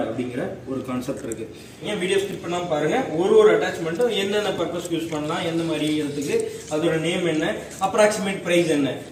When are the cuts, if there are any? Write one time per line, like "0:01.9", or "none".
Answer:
0:01.9

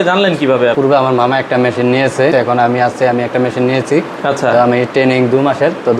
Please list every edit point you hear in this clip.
0:00.8
0:02.3

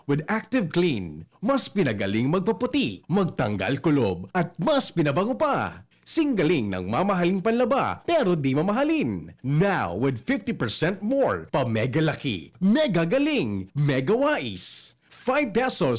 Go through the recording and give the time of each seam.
none

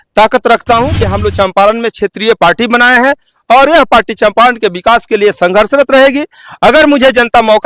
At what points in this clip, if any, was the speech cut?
0:01.1

